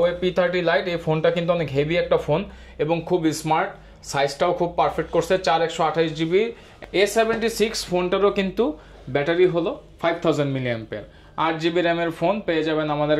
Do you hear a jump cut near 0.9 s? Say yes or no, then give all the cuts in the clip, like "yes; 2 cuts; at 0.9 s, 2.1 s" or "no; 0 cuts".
no; 1 cut; at 6.7 s